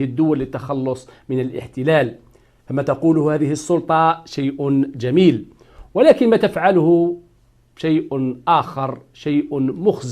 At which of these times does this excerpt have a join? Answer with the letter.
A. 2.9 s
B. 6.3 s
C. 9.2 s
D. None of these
B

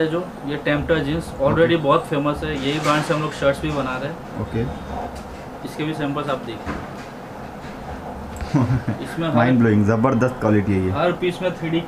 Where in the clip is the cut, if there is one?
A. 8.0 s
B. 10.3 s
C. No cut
C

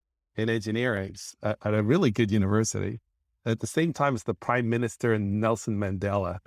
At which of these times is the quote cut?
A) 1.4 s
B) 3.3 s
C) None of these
B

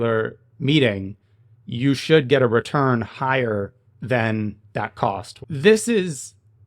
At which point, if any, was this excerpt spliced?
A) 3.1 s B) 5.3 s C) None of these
B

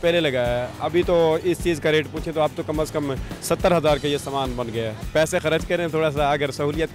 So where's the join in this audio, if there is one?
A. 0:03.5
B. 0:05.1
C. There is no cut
B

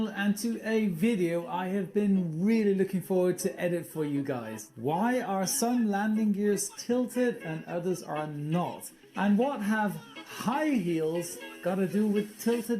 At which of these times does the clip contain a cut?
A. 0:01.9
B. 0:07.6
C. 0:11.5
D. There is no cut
D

